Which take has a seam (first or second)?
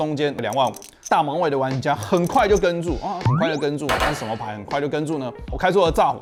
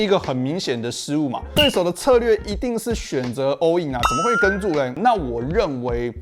second